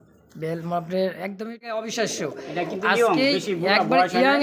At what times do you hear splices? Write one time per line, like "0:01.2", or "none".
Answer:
0:01.4